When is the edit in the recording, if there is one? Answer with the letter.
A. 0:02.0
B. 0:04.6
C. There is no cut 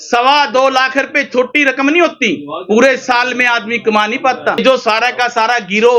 B